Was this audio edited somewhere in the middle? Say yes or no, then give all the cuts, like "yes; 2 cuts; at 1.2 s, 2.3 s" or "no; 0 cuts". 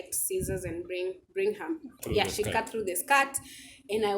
yes; 1 cut; at 2.0 s